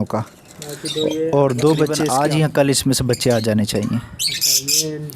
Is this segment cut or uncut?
cut